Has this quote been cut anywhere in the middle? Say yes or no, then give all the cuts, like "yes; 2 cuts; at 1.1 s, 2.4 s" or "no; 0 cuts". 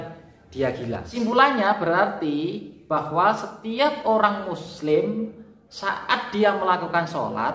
yes; 1 cut; at 1.1 s